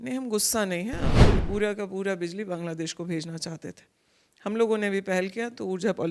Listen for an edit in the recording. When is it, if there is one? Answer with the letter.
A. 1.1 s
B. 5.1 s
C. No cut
A